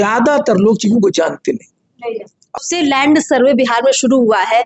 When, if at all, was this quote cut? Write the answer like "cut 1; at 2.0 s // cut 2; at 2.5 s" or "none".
cut 1; at 2.6 s